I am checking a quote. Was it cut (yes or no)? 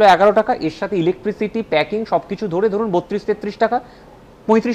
no